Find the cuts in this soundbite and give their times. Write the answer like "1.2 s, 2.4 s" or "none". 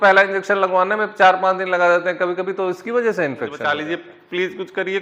3.7 s